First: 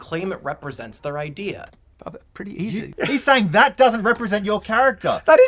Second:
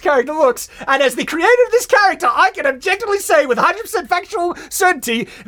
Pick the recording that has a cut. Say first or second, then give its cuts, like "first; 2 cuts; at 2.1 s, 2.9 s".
first; 1 cut; at 2.9 s